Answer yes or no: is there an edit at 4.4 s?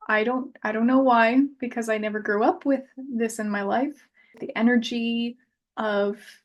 yes